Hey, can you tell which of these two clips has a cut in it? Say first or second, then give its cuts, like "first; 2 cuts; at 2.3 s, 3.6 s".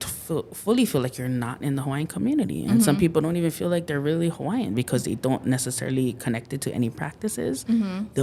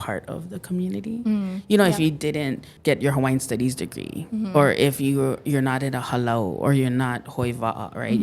second; 1 cut; at 2.7 s